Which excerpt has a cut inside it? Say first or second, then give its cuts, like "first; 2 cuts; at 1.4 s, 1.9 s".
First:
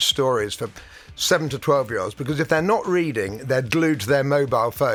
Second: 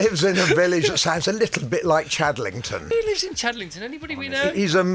second; 1 cut; at 2.9 s